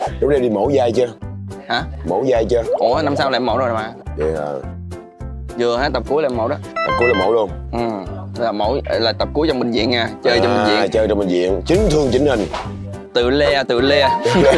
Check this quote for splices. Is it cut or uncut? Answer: uncut